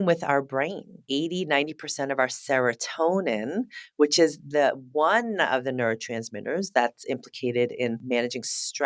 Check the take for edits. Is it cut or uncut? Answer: cut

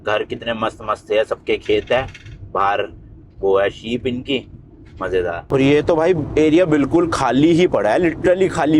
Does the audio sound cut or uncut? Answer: cut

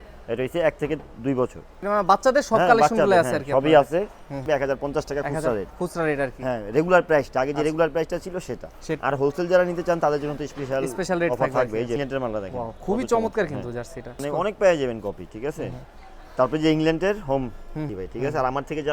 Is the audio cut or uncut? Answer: cut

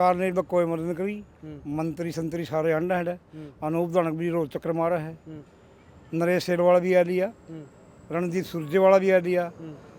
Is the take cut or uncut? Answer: uncut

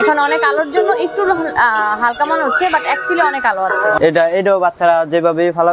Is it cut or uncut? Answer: cut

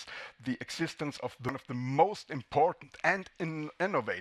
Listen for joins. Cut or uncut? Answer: cut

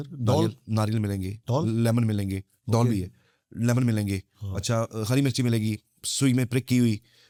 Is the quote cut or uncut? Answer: uncut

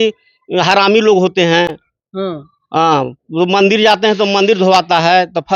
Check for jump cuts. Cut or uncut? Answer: uncut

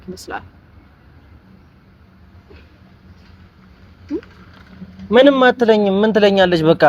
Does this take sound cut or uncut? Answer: uncut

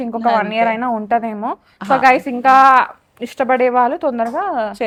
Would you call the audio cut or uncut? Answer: uncut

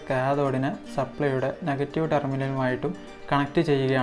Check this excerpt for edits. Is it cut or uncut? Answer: uncut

